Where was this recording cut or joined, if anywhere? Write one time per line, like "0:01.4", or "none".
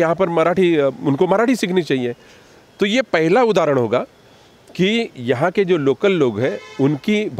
none